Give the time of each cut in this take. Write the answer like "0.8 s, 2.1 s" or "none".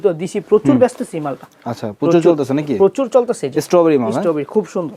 none